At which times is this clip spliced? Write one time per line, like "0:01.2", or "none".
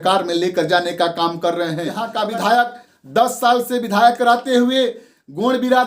0:02.0

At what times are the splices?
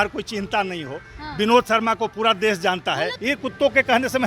0:03.1

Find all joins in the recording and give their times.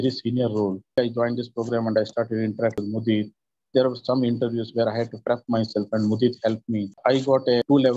0:00.9
0:06.9

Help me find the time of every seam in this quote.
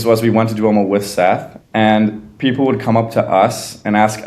0:01.5

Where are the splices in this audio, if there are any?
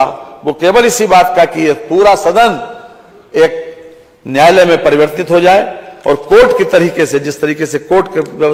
none

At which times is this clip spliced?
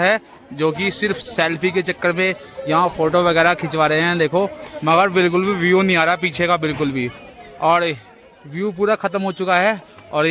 none

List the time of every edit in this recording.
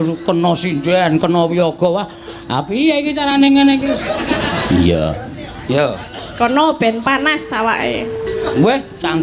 none

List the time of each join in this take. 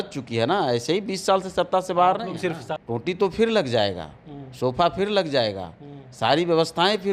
0:02.7

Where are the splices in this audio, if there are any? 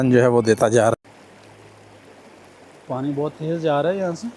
0:00.9

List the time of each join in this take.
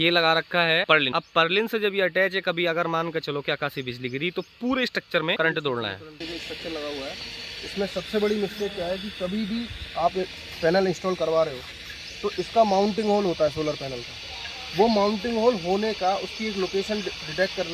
0:01.0
0:05.4
0:06.3

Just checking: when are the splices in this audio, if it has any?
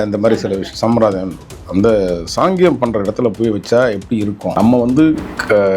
0:04.5

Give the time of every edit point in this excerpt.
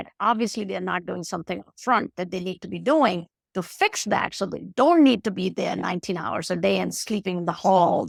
none

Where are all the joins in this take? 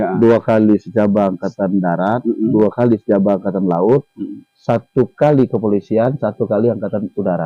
none

